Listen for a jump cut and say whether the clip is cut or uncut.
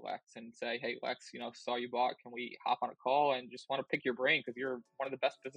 uncut